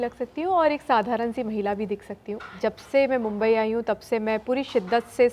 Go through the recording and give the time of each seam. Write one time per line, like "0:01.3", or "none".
0:02.5